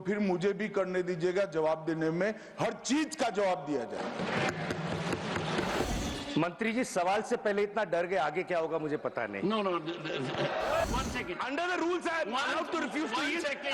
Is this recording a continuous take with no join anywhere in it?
no; 2 cuts; at 5.8 s, 10.8 s

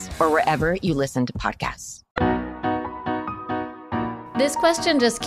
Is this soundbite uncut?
yes; 0 cuts

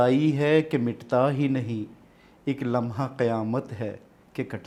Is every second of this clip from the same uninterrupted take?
yes; 0 cuts

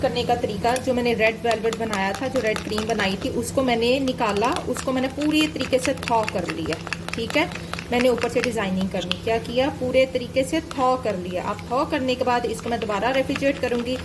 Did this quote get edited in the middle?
no; 0 cuts

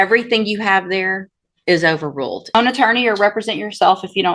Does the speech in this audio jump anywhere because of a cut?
yes; 1 cut; at 2.5 s

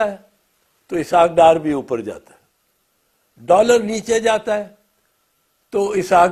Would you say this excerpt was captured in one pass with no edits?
yes; 0 cuts

